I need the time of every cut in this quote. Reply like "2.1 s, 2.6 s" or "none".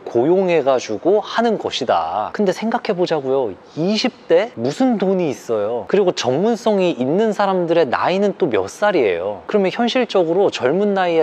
none